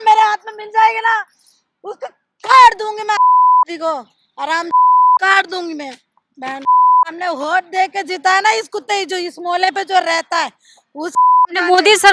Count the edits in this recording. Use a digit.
0